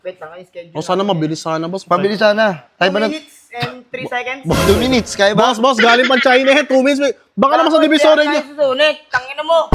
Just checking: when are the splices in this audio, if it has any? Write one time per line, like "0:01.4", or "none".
none